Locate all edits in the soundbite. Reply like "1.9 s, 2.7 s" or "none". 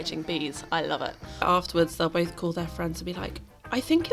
1.4 s

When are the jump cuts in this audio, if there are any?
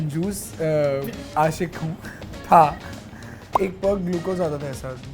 3.5 s

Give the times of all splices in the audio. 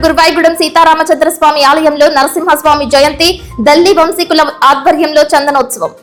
none

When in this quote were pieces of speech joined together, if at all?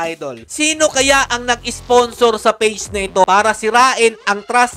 3.2 s

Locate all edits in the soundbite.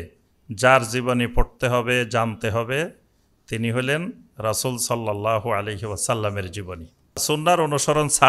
7.2 s

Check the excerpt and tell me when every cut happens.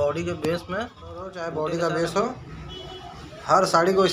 1.4 s

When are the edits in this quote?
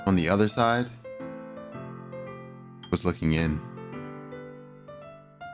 none

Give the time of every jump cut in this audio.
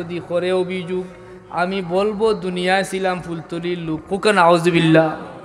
none

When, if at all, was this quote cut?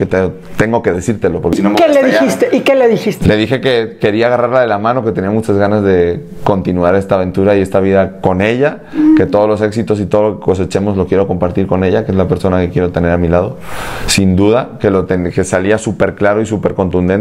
none

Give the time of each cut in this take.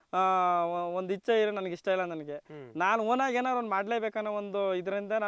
none

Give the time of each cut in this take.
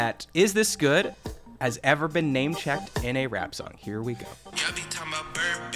4.5 s

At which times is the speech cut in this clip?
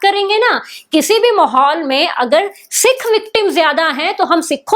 none

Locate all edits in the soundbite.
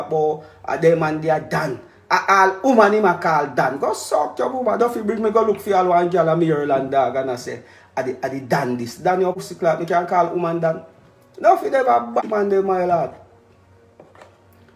9.4 s, 12.2 s

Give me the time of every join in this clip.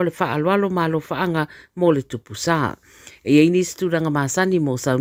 none

